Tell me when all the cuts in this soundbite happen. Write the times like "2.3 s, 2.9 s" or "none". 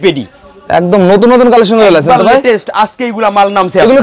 none